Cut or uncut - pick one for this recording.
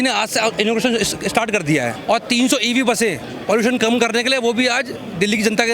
cut